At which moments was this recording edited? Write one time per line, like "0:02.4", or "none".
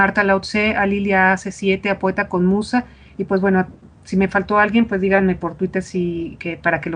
0:05.3

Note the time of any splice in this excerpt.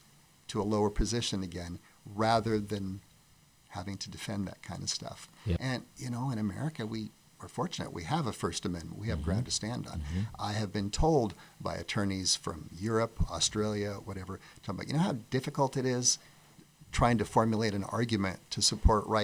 0:05.6

